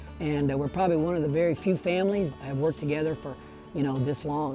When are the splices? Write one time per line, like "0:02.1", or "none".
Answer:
0:02.3